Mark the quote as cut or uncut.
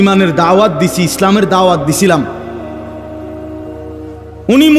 cut